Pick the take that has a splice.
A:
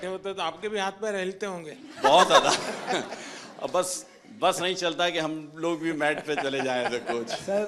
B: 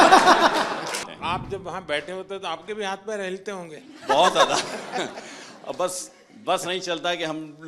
B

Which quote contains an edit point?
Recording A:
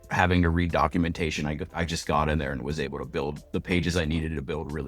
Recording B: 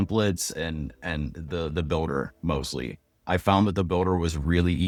A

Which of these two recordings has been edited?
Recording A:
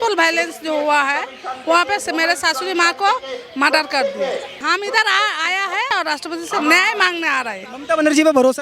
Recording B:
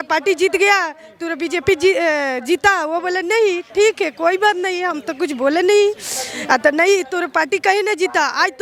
A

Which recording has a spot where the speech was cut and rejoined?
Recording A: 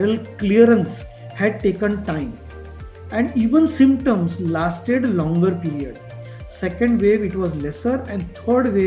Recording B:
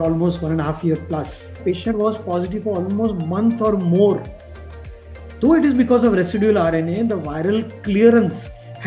B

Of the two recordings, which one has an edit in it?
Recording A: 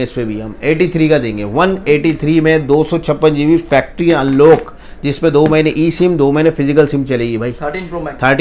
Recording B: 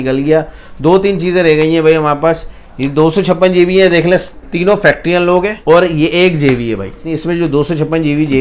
B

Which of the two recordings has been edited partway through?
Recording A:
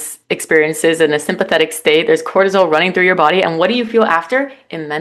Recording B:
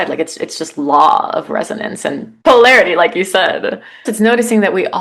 B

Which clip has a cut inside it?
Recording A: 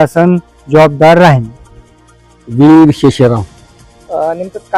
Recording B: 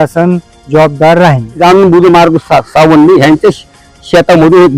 B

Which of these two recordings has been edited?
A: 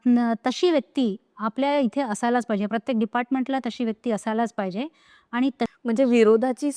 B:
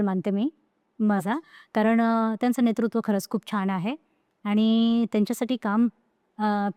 A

